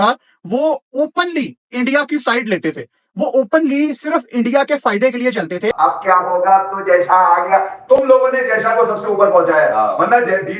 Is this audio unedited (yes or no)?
no